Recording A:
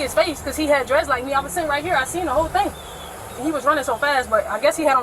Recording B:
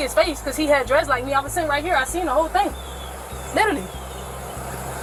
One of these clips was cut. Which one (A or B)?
A